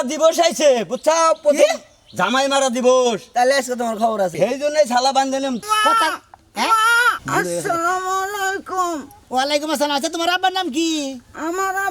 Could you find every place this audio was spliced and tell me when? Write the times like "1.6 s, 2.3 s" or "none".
4.3 s, 5.6 s, 7.2 s